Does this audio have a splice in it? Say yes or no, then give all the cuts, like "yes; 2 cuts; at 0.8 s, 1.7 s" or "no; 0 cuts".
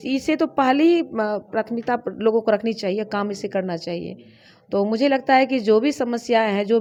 no; 0 cuts